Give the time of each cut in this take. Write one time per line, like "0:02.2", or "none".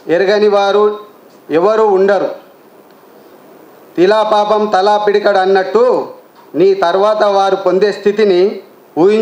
none